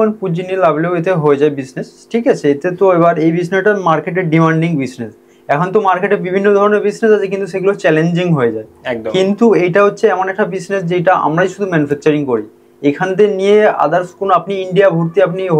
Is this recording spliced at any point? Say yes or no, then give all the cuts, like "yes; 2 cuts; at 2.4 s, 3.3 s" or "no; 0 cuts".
no; 0 cuts